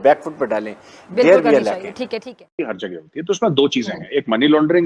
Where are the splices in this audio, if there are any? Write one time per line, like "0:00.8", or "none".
none